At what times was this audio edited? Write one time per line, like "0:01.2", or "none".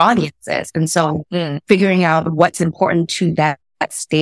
none

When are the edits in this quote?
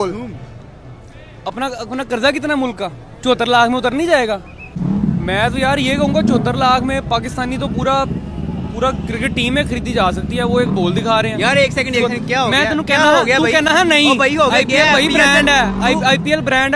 0:03.1
0:04.6

